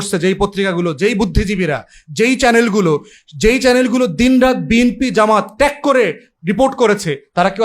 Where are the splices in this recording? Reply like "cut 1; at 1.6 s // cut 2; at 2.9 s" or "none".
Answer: none